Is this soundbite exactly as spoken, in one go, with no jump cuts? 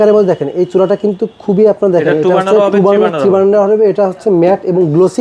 yes; 0 cuts

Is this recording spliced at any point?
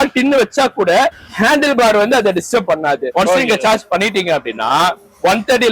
yes; 2 cuts; at 1.3 s, 3.1 s

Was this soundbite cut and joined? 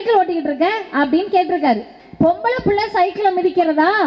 yes; 1 cut; at 2.0 s

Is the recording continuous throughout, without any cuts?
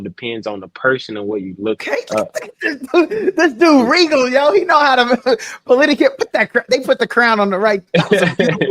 no; 1 cut; at 1.8 s

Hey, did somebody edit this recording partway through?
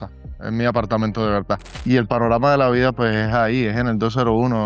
yes; 1 cut; at 1.7 s

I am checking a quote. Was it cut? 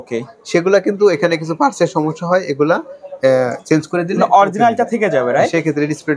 no; 0 cuts

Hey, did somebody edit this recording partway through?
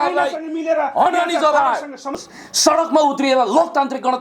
yes; 1 cut; at 2.2 s

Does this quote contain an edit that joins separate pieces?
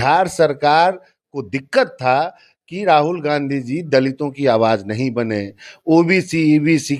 no; 0 cuts

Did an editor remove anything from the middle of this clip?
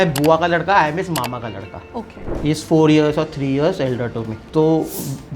yes; 2 cuts; at 2.2 s, 4.4 s

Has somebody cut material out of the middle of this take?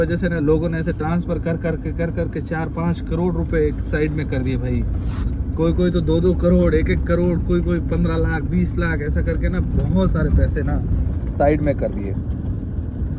no; 0 cuts

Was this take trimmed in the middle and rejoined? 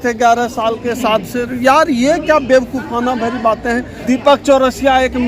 yes; 1 cut; at 3.9 s

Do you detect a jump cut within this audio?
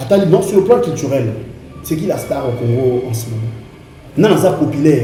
no; 0 cuts

